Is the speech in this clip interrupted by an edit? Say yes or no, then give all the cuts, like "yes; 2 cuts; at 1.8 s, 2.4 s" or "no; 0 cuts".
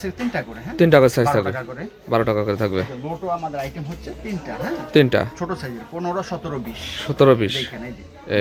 no; 0 cuts